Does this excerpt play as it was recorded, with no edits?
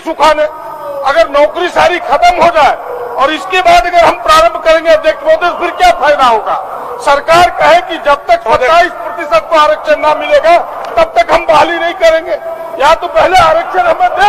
yes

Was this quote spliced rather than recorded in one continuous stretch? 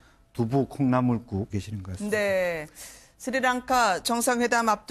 no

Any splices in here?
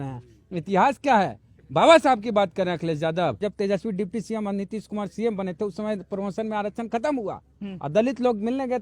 yes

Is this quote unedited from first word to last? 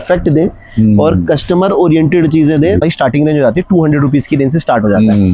no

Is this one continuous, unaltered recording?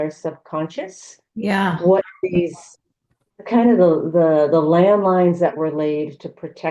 yes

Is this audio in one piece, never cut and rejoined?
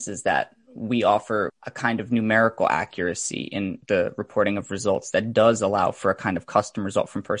no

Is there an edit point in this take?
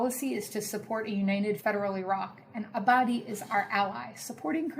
yes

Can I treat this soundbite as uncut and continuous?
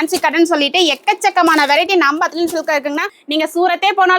no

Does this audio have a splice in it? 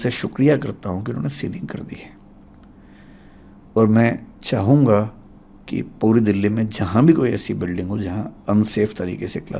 no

